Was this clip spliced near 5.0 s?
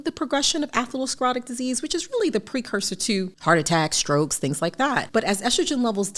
yes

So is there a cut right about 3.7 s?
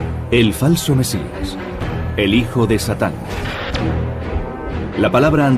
no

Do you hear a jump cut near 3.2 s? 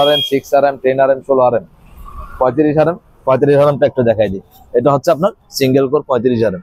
no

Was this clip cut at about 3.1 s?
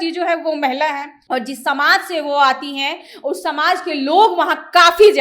no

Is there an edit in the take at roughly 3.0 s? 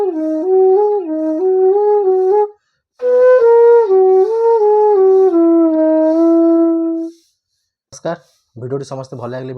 no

